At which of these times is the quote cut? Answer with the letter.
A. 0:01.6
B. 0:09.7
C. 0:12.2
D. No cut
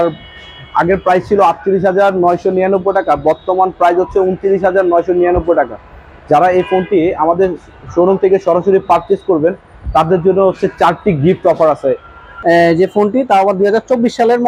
C